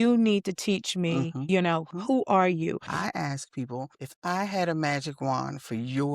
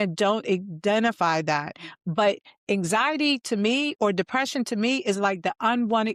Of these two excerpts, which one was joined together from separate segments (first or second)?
first